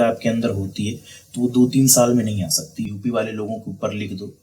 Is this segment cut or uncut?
cut